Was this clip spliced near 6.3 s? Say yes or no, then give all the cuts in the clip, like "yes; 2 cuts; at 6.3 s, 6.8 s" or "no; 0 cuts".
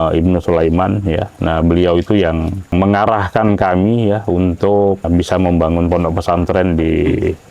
no; 2 cuts; at 2.7 s, 5.1 s